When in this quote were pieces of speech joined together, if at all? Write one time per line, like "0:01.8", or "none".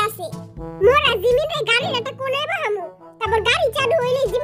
none